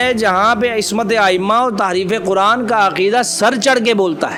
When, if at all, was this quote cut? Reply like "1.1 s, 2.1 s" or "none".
none